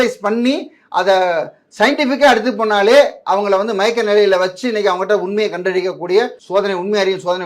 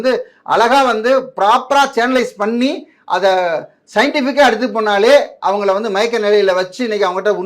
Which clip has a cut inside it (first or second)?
first